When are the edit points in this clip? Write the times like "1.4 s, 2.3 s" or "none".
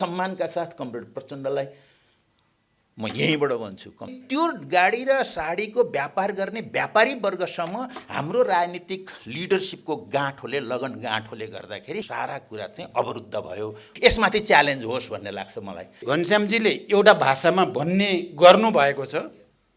4.2 s, 12.1 s, 13.9 s, 16.0 s